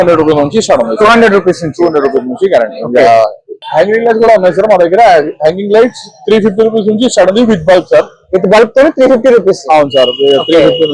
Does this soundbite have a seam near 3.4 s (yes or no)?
yes